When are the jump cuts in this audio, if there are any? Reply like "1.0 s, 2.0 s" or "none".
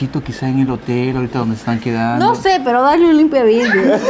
none